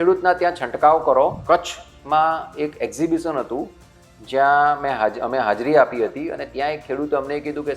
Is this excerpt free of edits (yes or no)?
no